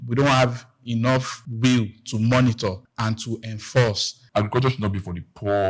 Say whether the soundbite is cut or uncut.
cut